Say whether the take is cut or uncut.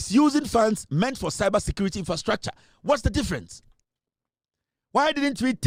uncut